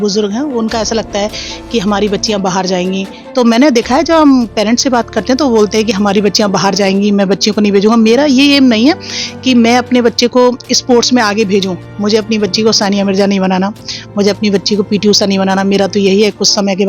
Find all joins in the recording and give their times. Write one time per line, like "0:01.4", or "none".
0:03.2